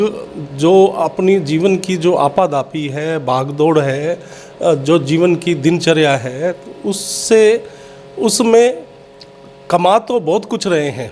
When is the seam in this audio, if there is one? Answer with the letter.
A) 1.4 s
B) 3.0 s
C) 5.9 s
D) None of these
D